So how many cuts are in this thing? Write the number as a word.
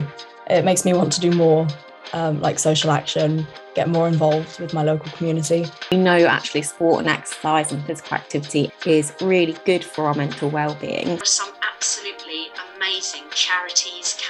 zero